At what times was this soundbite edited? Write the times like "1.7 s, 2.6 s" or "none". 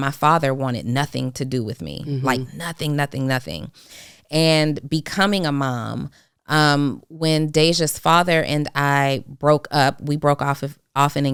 none